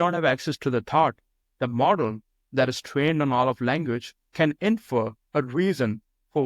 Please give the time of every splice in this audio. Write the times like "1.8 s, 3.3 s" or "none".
none